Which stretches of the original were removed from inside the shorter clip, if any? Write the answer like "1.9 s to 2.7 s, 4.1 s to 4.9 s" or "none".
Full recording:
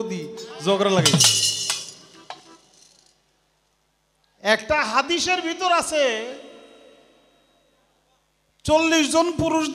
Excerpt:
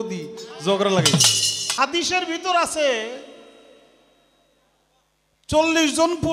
1.7 s to 4.9 s